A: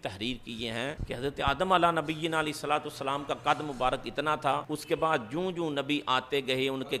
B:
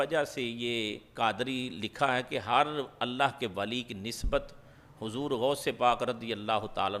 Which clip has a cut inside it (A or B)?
A